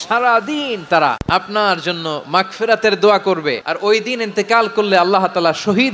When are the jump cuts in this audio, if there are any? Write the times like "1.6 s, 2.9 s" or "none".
1.2 s, 3.7 s